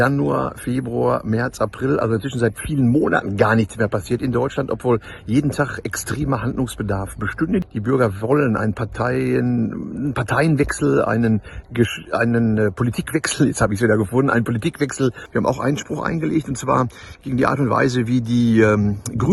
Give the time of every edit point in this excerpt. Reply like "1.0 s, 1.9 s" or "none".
7.7 s, 15.2 s